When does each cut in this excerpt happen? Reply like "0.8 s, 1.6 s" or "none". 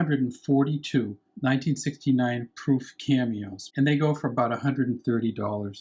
3.6 s